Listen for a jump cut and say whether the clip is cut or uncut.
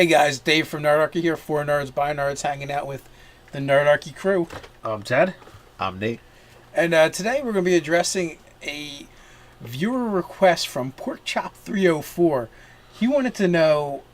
cut